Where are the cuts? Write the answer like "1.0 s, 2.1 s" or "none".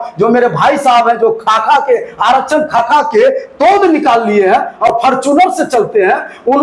none